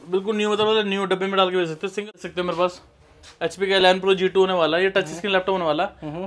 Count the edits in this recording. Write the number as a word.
one